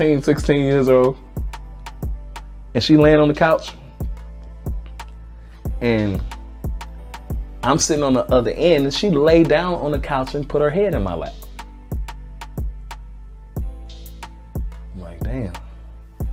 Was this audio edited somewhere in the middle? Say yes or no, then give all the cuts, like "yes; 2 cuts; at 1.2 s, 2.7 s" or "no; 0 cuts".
no; 0 cuts